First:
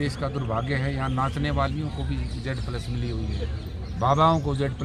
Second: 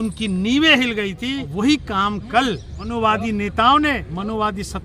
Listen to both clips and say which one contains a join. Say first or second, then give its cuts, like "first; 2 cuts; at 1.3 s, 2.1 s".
second; 2 cuts; at 1.5 s, 2.7 s